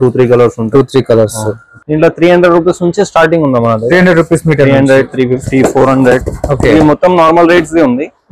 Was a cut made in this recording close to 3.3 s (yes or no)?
no